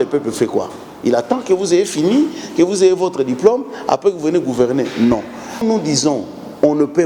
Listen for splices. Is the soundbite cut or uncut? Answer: cut